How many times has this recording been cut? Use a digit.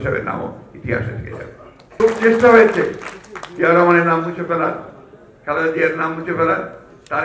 1